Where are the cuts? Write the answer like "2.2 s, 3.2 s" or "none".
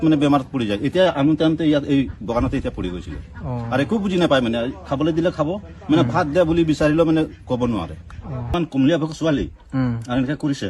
8.5 s